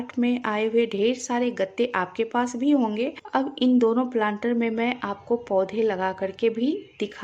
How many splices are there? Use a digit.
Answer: 1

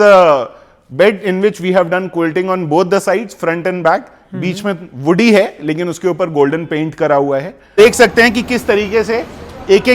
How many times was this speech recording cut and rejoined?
1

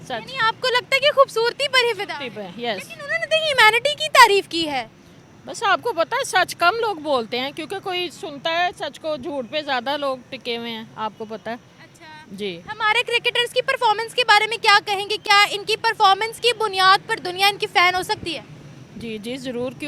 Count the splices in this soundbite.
0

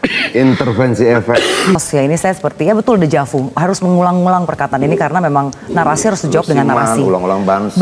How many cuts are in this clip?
1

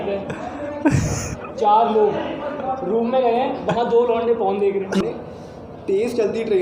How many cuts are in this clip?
1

